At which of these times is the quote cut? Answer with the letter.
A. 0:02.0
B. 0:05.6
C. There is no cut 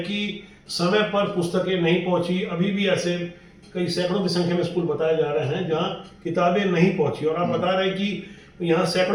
C